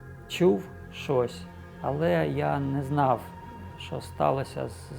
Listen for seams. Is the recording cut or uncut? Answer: uncut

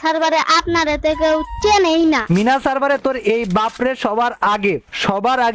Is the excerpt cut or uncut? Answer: uncut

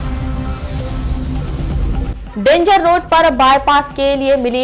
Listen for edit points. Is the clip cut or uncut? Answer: cut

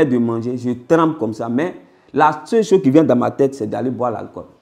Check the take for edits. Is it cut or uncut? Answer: uncut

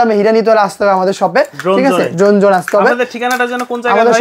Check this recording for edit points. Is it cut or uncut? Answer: uncut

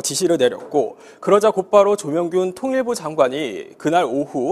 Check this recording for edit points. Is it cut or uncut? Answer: cut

